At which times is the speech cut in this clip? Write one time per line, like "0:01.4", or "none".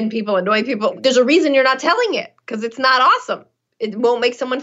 0:00.9